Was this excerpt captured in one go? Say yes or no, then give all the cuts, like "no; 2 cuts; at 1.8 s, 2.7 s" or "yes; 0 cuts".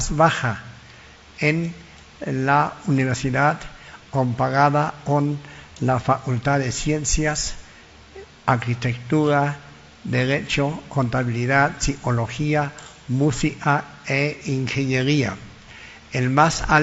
yes; 0 cuts